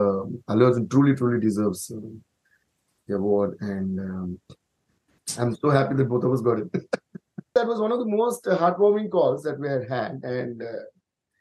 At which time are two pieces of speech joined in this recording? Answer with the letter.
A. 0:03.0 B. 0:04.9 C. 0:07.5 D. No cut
C